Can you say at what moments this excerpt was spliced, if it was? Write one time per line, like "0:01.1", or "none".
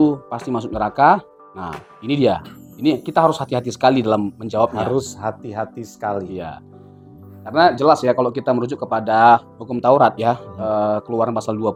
none